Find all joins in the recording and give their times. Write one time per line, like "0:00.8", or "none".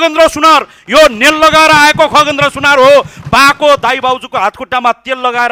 none

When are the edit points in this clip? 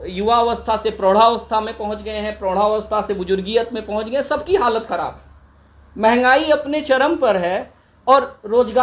none

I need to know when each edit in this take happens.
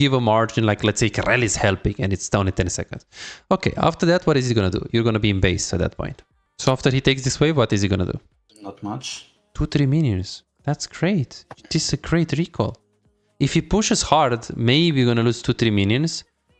0:08.4

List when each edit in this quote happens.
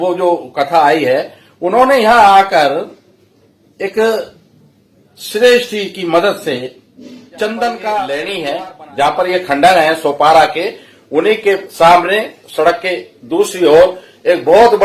0:08.2

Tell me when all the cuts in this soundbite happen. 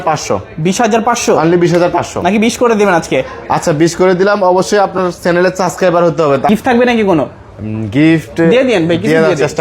0:06.5

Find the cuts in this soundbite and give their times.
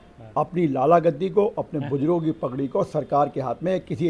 none

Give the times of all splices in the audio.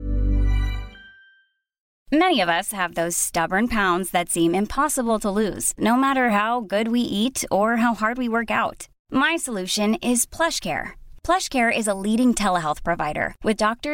0:01.9

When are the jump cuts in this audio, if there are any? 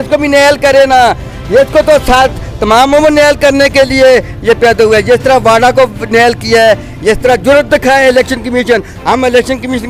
none

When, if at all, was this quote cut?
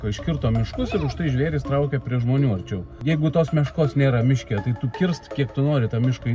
0:03.0

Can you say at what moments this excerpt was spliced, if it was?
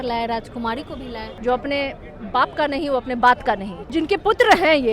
0:01.3
0:03.9

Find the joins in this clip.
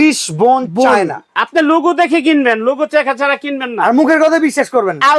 none

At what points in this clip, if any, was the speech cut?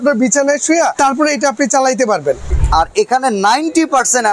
0:00.9
0:02.5

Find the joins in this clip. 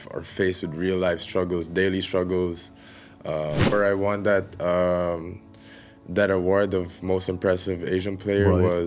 0:03.7

